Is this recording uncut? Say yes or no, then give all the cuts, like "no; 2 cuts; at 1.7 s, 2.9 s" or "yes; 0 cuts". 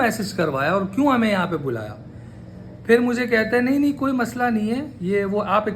yes; 0 cuts